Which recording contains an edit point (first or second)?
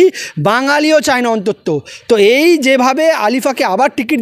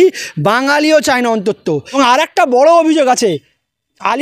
second